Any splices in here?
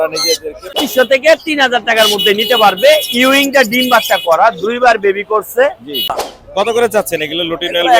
yes; 2 cuts; at 0.8 s, 6.2 s

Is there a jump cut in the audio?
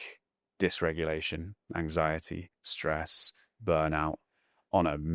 no; 0 cuts

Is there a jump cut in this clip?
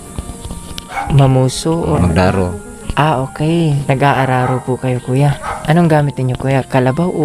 yes; 2 cuts; at 2.0 s, 3.8 s

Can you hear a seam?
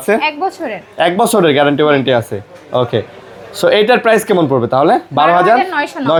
no; 0 cuts

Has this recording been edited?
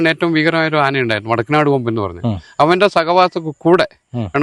no; 0 cuts

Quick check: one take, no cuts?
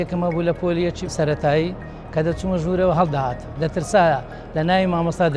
no; 1 cut; at 1.0 s

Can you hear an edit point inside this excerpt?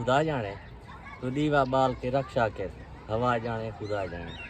no; 0 cuts

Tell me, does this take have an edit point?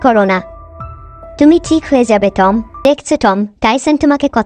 yes; 1 cut; at 2.7 s

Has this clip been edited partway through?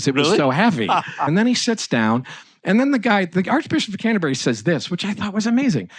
yes; 1 cut; at 1.3 s

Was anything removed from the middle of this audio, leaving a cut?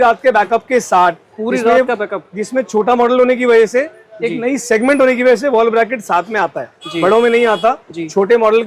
no; 0 cuts

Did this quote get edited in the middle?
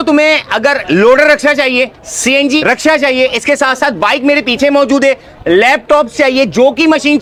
no; 0 cuts

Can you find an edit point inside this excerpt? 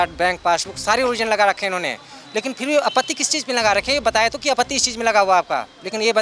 no; 0 cuts

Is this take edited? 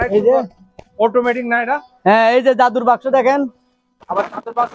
no; 0 cuts

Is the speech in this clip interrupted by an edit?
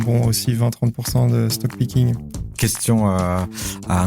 yes; 1 cut; at 2.5 s

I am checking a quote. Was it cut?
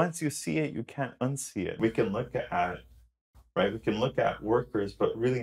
yes; 1 cut; at 1.7 s

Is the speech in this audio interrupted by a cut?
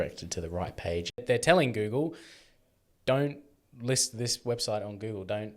yes; 1 cut; at 1.2 s

